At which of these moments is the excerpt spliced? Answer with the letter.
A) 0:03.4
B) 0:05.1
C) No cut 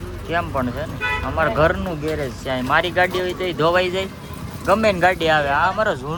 C